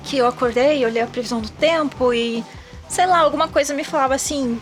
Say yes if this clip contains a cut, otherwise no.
no